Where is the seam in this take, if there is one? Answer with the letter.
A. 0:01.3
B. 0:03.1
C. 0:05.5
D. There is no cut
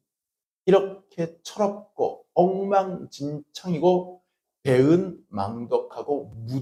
D